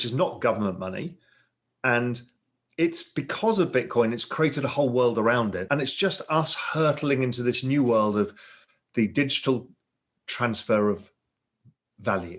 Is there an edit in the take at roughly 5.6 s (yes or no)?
yes